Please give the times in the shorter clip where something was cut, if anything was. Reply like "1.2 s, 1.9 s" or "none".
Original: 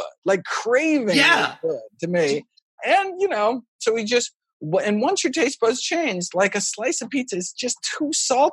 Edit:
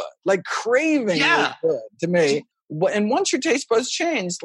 2.6 s